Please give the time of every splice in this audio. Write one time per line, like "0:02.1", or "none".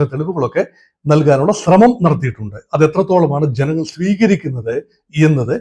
none